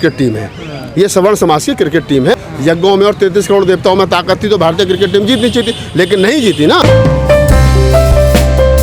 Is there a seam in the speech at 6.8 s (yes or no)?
yes